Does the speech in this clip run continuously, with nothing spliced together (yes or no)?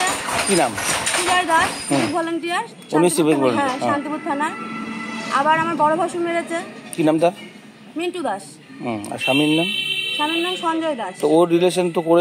yes